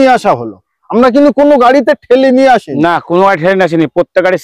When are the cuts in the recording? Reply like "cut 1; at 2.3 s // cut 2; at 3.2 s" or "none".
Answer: none

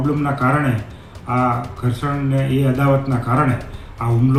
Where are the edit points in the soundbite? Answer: none

